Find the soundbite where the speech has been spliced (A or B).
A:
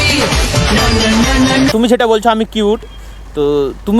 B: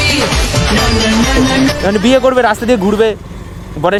A